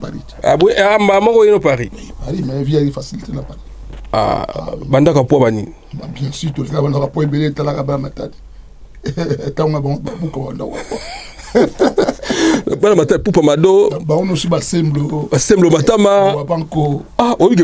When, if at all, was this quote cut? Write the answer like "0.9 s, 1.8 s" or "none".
12.7 s